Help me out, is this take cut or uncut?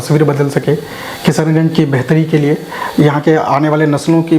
uncut